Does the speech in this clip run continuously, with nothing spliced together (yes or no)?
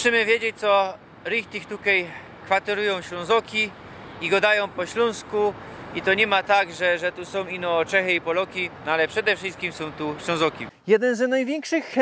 no